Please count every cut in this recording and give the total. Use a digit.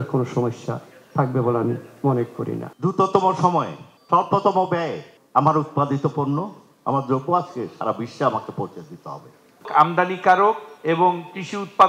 2